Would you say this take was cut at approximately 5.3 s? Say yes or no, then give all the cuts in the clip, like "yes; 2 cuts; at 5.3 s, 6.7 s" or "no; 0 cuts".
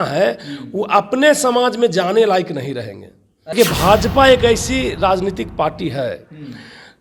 no; 1 cut; at 3.5 s